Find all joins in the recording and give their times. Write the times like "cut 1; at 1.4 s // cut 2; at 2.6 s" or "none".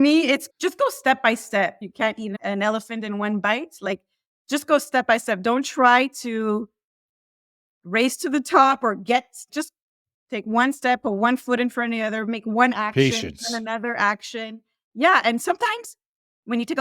cut 1; at 1.8 s